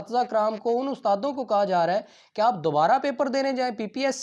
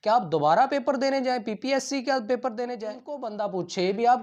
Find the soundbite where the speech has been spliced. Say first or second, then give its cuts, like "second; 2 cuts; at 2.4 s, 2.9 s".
second; 1 cut; at 3.3 s